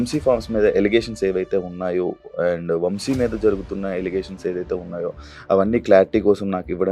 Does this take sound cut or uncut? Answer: uncut